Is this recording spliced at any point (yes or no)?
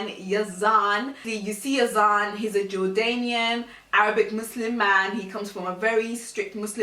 yes